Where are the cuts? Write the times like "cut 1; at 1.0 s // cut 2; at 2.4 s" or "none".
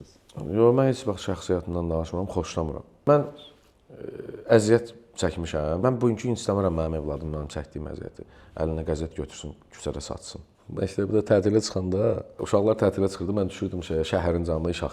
cut 1; at 3.1 s // cut 2; at 5.8 s // cut 3; at 10.5 s // cut 4; at 12.3 s

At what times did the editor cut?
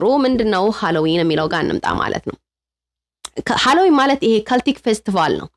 none

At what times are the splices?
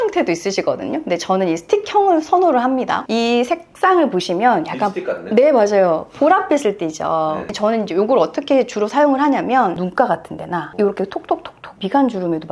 cut 1; at 7.4 s

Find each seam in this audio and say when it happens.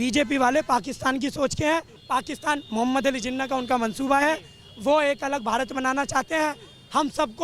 cut 1; at 1.9 s

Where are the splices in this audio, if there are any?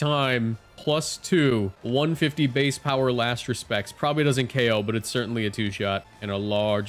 cut 1; at 1.8 s

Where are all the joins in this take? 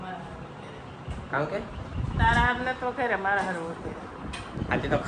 none

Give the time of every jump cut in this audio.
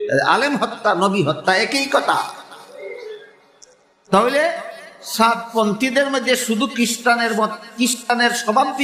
none

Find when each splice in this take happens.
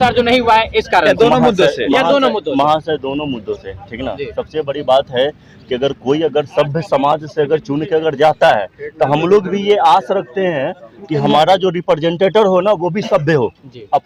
none

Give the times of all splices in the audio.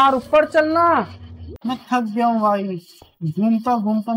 cut 1; at 1.5 s

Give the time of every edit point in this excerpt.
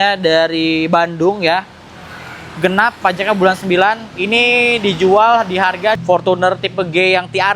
cut 1; at 6.0 s

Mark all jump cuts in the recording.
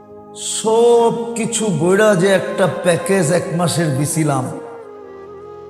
cut 1; at 4.5 s

